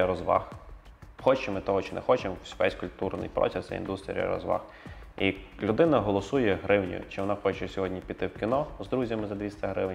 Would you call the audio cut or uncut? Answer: uncut